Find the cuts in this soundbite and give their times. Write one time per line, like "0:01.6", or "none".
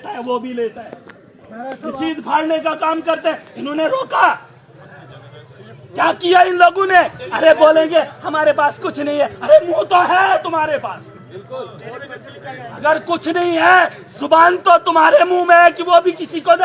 none